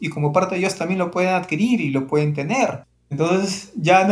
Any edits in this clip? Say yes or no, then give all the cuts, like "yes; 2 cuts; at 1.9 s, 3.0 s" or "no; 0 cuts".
no; 0 cuts